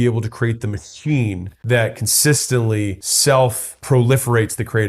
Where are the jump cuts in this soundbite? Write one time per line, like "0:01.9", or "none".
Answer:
0:01.5
0:03.0
0:03.7